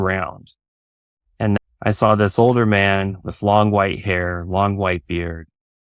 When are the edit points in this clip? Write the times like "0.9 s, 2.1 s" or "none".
1.6 s